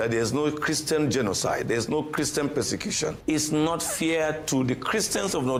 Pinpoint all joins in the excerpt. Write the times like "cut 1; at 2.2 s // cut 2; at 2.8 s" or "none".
none